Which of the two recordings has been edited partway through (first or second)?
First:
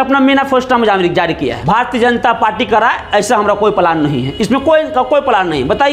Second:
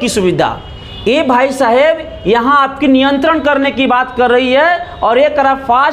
first